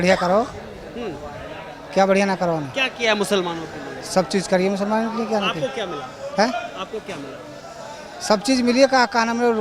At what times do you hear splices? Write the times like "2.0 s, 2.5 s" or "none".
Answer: none